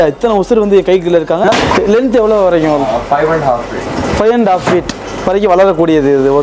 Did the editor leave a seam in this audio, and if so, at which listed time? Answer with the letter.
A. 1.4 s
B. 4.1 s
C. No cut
A